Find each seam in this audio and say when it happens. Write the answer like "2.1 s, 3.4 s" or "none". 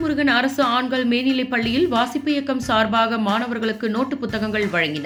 none